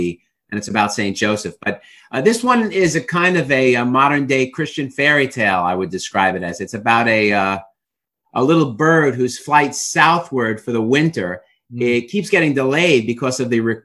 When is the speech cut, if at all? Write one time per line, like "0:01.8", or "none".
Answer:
none